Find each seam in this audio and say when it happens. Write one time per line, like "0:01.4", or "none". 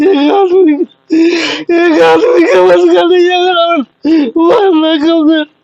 0:00.9
0:03.9